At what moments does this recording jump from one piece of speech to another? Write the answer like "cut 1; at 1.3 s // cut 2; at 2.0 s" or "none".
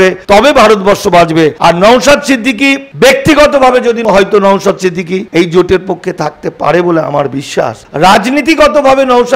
cut 1; at 7.9 s